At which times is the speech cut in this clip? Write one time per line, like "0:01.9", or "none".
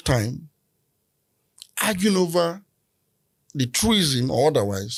none